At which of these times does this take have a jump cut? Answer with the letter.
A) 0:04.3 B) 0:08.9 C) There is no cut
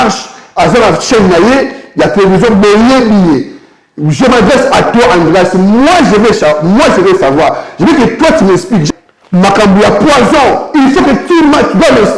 B